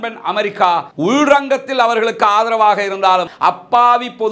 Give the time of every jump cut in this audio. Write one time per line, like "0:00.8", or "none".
0:03.3